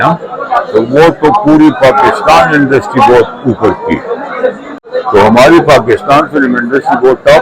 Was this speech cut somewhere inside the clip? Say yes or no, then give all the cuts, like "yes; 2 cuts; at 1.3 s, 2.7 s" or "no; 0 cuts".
yes; 1 cut; at 4.8 s